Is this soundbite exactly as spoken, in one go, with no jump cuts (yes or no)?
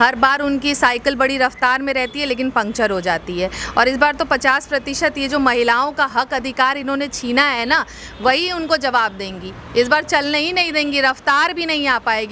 yes